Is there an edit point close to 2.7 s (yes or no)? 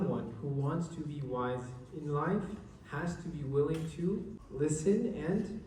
no